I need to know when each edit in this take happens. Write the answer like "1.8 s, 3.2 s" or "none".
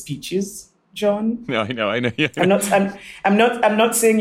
none